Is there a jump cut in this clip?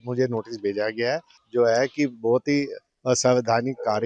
yes; 1 cut; at 1.4 s

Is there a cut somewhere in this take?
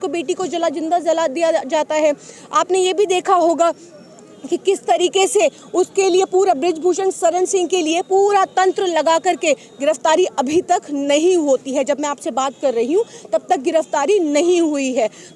no; 0 cuts

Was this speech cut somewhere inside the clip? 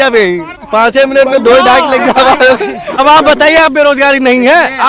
yes; 1 cut; at 3.0 s

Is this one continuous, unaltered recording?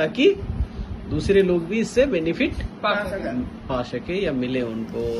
yes; 0 cuts

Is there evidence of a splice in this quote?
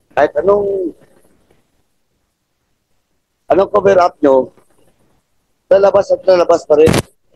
no; 0 cuts

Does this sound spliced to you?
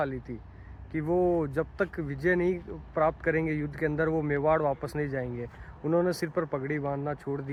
no; 0 cuts

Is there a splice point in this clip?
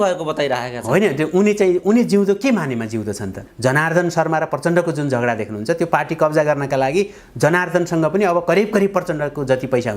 yes; 1 cut; at 3.4 s

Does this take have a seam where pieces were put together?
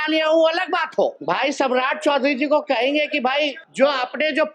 yes; 2 cuts; at 1.2 s, 3.6 s

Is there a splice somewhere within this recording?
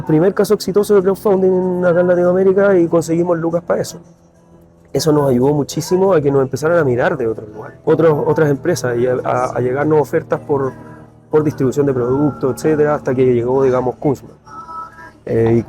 yes; 1 cut; at 7.8 s

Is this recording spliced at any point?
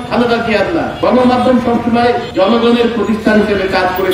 yes; 2 cuts; at 0.9 s, 2.3 s

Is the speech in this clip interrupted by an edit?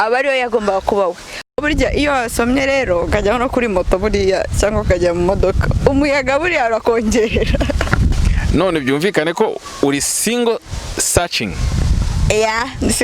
yes; 2 cuts; at 1.3 s, 8.1 s

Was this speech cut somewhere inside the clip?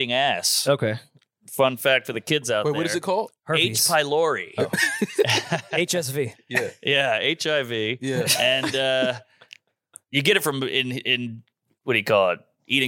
no; 0 cuts

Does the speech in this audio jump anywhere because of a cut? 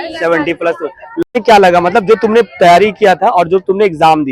yes; 1 cut; at 1.3 s

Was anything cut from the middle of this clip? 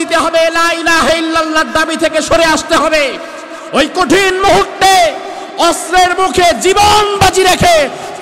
no; 0 cuts

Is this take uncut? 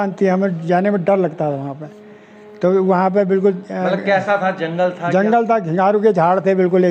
yes; 0 cuts

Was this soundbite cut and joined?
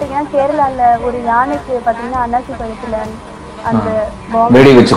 no; 0 cuts

